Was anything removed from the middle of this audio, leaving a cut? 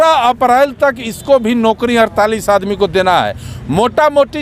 no; 0 cuts

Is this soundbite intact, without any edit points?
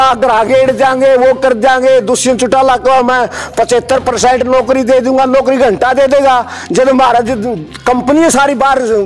yes; 0 cuts

